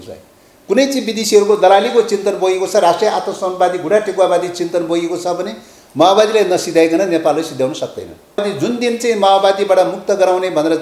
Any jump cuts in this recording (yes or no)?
yes